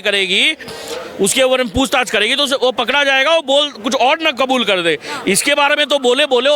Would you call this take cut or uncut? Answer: uncut